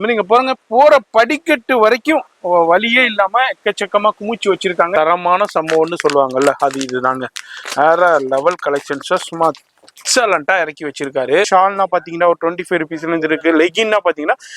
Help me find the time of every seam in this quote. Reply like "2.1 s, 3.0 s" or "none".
4.9 s, 11.5 s

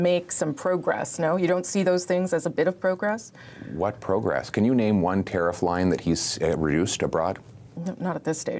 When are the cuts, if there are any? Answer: none

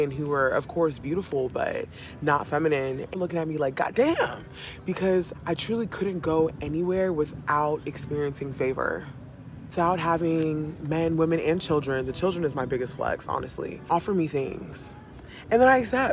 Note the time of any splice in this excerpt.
5.3 s, 9.7 s, 13.9 s

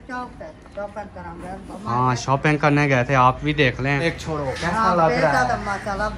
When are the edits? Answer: 4.0 s

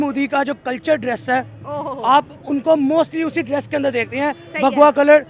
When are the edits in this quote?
none

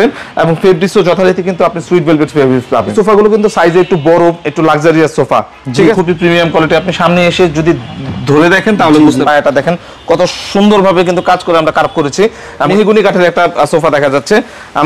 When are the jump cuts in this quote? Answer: 2.9 s, 5.9 s, 9.2 s, 12.7 s

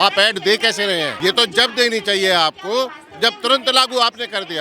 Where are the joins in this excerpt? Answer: 1.1 s

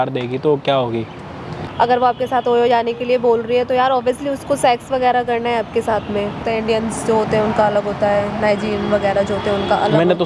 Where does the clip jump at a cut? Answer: 1.5 s, 6.4 s

